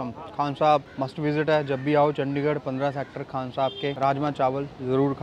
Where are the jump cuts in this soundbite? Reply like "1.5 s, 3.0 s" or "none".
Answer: 0.9 s, 4.0 s